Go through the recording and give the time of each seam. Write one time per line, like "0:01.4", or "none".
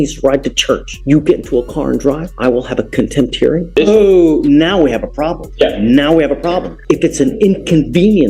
0:00.9
0:02.3
0:03.7
0:05.4
0:06.7